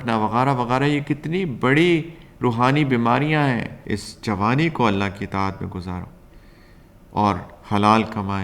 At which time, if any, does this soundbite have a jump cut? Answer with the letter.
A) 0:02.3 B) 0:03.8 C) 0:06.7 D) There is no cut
B